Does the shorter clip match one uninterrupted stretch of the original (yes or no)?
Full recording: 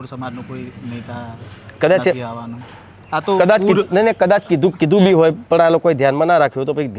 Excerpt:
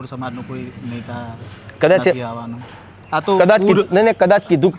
yes